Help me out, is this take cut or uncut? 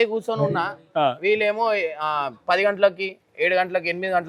uncut